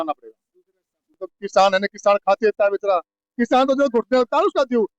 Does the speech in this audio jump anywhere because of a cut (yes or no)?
yes